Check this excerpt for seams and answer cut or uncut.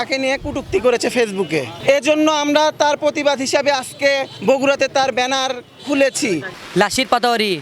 cut